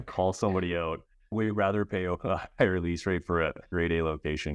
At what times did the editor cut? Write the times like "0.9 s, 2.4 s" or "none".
1.3 s, 3.7 s